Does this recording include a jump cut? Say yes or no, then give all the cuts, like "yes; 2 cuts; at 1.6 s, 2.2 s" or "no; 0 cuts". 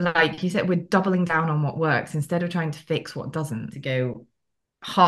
yes; 1 cut; at 3.7 s